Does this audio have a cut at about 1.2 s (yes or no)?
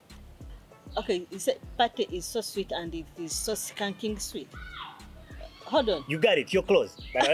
no